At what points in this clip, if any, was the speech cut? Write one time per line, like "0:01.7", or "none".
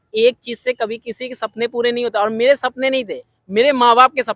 none